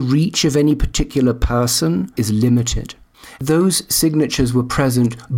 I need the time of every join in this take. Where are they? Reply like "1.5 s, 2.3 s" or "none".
2.1 s, 3.4 s